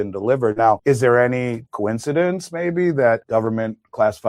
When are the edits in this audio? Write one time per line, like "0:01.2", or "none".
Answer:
0:00.8
0:01.6
0:03.2